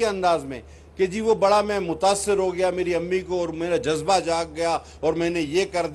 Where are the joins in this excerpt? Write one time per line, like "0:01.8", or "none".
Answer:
none